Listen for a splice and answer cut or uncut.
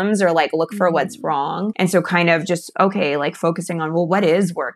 cut